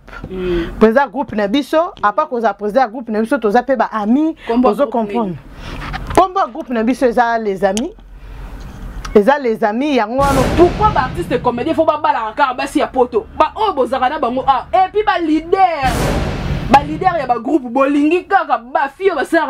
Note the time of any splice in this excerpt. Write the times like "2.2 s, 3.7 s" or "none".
10.4 s